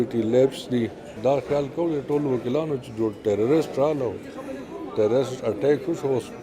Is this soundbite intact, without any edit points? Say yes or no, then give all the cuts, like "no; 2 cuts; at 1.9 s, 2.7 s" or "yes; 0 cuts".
no; 1 cut; at 1.1 s